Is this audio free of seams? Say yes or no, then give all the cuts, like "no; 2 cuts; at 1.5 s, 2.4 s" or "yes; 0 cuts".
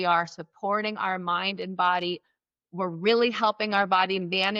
yes; 0 cuts